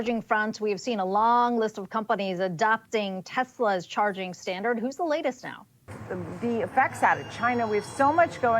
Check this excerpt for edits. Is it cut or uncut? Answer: cut